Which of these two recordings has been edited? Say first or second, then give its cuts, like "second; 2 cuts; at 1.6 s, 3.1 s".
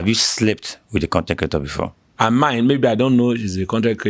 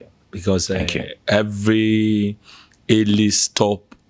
first; 1 cut; at 2.0 s